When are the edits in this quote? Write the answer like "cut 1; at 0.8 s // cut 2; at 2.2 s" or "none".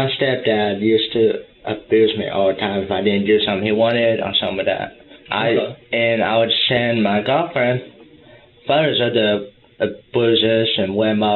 none